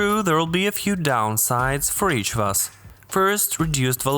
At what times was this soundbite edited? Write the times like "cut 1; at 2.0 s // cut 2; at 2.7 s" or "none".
none